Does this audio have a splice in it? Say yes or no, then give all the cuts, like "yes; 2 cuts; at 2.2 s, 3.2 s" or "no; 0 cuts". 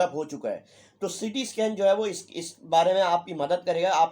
no; 0 cuts